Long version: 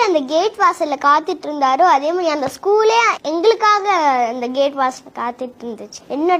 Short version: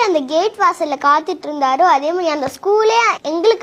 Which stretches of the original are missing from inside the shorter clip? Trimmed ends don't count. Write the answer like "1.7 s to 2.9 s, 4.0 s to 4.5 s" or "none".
none